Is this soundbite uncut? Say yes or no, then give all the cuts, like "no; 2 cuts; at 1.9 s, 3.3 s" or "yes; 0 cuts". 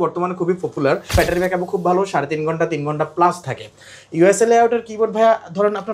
no; 1 cut; at 1.2 s